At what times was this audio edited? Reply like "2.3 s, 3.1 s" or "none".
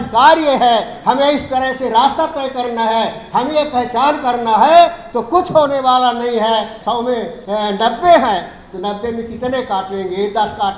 6.9 s